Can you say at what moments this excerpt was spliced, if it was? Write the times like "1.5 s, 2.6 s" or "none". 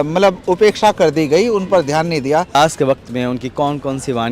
2.5 s